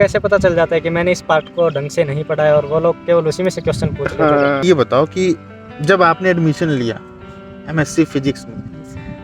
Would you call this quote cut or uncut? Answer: cut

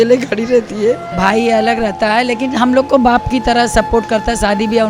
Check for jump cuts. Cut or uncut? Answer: cut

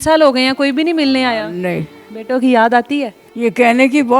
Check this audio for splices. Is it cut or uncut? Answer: cut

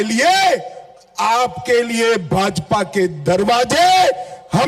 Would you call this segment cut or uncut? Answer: uncut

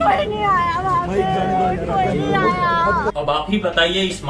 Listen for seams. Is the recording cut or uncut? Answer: cut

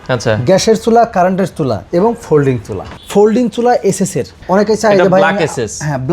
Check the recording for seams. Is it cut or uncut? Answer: cut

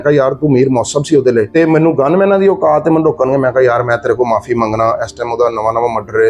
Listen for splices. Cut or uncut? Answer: cut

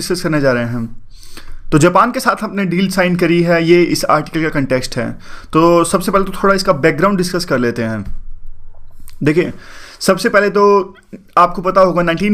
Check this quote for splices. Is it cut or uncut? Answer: uncut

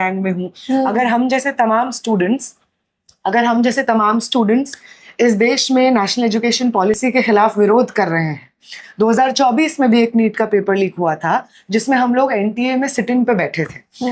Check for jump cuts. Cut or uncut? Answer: uncut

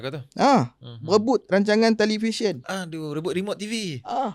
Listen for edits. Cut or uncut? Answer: uncut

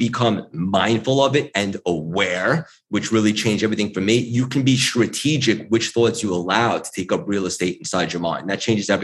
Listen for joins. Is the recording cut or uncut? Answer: uncut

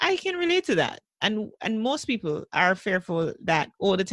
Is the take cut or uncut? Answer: uncut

